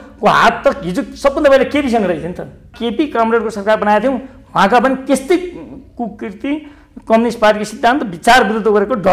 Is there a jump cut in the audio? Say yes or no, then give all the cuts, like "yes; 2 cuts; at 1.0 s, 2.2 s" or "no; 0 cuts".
yes; 1 cut; at 2.8 s